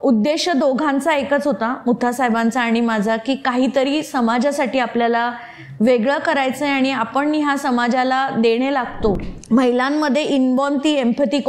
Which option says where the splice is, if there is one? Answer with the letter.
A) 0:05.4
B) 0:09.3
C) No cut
B